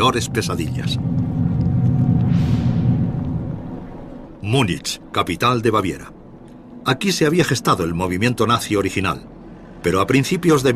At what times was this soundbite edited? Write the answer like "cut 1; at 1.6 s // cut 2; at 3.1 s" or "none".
cut 1; at 2.1 s